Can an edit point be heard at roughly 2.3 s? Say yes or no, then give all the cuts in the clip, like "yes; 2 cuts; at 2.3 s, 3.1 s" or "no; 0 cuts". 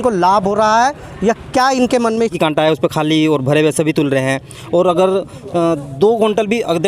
yes; 1 cut; at 2.3 s